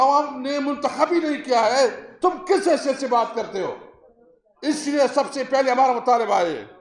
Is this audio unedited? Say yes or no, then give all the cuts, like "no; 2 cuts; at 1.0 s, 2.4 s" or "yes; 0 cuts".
yes; 0 cuts